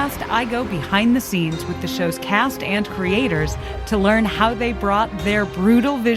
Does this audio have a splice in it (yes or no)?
no